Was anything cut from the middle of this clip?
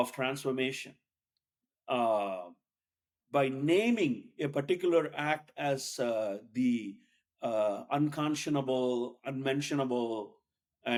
no; 0 cuts

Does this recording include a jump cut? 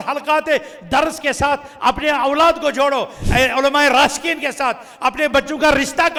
no; 0 cuts

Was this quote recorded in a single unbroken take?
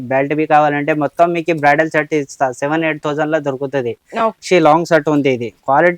yes; 0 cuts

